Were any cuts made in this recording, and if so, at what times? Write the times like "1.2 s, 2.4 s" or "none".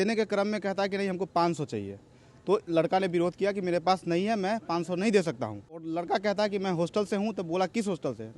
5.9 s

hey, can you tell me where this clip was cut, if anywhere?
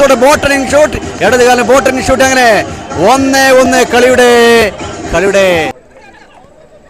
5.9 s

